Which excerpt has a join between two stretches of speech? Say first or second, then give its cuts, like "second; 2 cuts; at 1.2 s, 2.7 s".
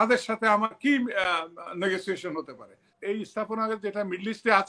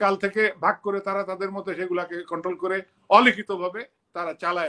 first; 1 cut; at 2.9 s